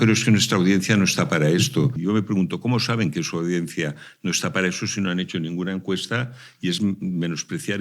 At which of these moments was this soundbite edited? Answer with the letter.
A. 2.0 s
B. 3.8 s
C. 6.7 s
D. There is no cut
A